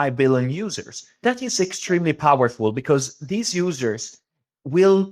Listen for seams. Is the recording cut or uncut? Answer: cut